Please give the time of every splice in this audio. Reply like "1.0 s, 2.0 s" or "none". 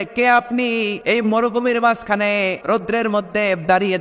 1.0 s, 2.6 s